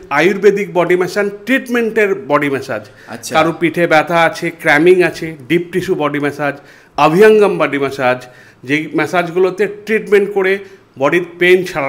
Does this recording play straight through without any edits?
yes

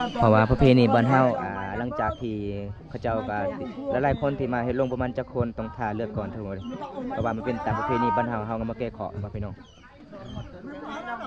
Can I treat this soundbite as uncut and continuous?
yes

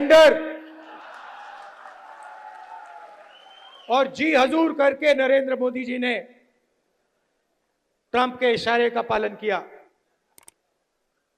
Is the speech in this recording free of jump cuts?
no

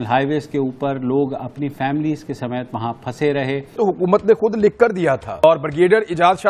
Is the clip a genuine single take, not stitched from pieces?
no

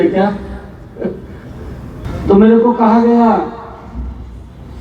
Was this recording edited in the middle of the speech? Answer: yes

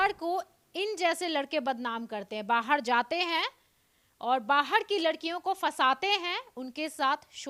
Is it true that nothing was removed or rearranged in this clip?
yes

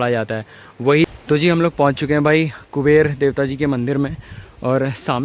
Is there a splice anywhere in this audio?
yes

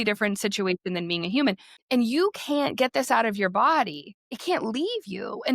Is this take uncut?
no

